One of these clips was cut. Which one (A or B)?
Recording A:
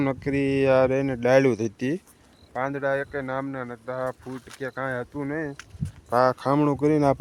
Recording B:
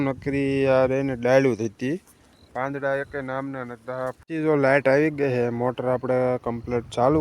B